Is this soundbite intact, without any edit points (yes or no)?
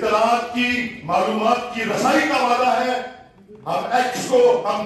yes